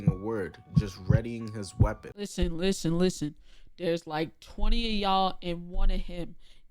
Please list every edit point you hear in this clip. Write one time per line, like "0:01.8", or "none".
0:02.3

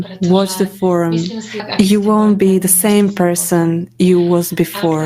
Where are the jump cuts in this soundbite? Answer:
0:01.7

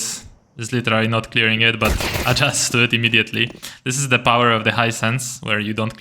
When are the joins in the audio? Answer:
none

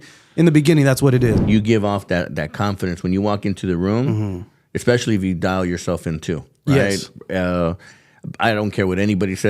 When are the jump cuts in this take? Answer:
0:01.4

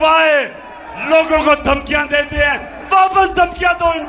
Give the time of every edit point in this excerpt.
none

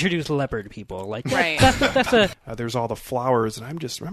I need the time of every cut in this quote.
0:02.3

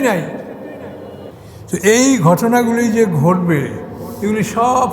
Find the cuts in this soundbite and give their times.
0:01.3

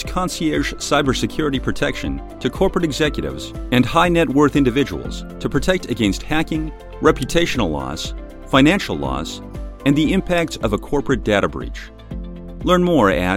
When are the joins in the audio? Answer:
none

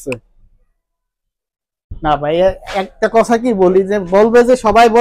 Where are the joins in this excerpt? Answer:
none

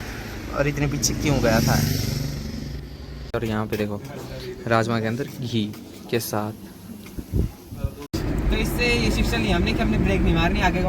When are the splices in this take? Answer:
0:03.3
0:08.1

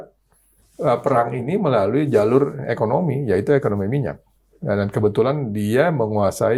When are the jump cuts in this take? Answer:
none

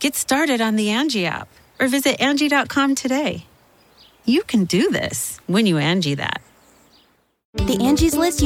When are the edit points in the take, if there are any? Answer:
0:07.5

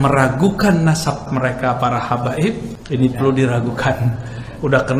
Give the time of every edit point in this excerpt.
0:01.3
0:02.7

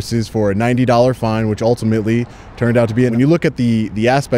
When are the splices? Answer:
0:03.1

